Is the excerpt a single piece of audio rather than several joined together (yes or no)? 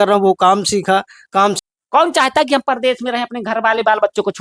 no